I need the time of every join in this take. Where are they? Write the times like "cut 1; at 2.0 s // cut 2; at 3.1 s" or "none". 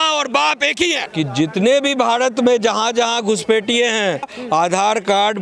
cut 1; at 1.0 s // cut 2; at 4.4 s